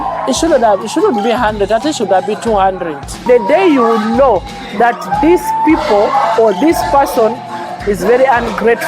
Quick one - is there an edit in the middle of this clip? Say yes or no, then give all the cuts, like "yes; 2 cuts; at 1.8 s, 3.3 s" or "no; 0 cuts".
yes; 1 cut; at 3.2 s